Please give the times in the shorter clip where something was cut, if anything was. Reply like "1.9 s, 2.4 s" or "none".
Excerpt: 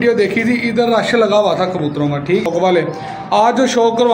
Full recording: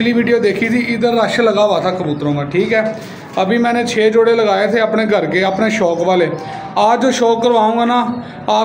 2.4 s